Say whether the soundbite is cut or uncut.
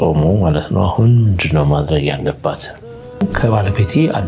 cut